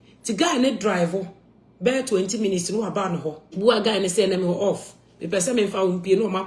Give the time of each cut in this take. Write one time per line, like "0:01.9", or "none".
0:03.4